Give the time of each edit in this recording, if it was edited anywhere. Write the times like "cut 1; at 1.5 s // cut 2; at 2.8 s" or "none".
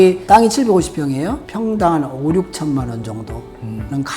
cut 1; at 1.5 s